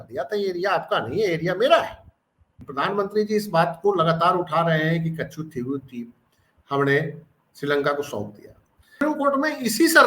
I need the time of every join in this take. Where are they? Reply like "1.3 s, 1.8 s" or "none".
2.6 s, 9.0 s

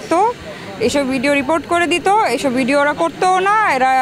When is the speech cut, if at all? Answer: none

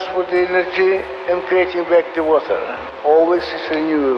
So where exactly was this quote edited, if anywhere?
2.8 s

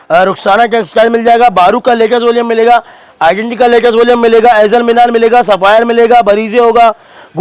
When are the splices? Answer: none

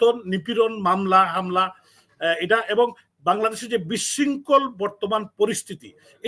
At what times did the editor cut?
none

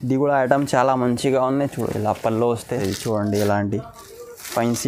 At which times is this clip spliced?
2.7 s

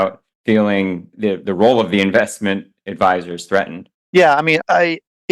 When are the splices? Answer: 1.1 s

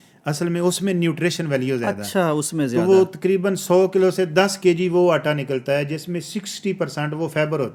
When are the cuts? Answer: none

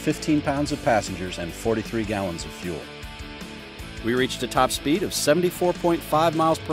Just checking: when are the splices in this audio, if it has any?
2.9 s

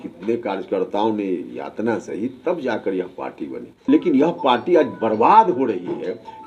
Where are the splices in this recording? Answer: 3.9 s

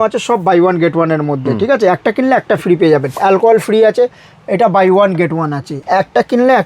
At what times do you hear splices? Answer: 3.2 s, 5.7 s

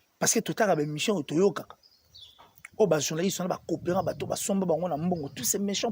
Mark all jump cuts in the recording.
none

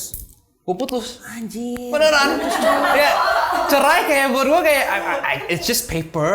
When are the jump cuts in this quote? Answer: none

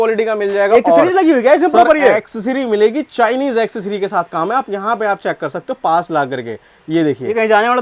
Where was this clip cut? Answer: none

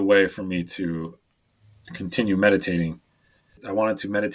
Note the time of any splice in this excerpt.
1.5 s, 3.5 s

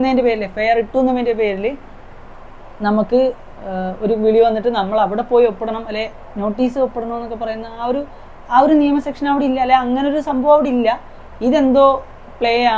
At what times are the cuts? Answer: none

